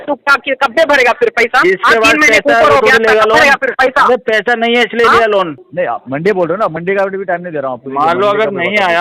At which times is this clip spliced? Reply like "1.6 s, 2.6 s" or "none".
5.6 s